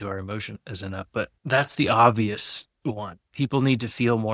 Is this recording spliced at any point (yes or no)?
yes